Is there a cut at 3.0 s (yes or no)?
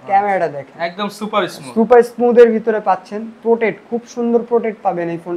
no